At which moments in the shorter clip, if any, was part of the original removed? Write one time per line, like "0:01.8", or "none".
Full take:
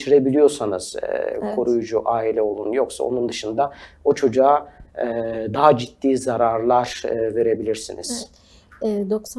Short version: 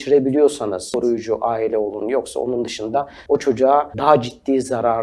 0:00.9
0:03.2
0:03.9